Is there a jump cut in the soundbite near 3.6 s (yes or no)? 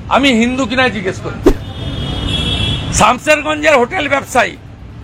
no